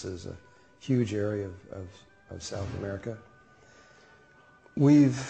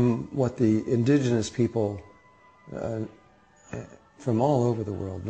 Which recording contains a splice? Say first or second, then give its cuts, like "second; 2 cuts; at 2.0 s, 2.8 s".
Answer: first; 1 cut; at 3.1 s